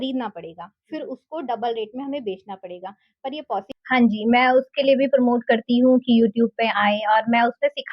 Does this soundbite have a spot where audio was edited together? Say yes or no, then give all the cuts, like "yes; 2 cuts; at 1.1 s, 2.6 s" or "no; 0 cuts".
yes; 1 cut; at 3.6 s